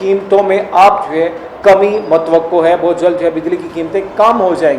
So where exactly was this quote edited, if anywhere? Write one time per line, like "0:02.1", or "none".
none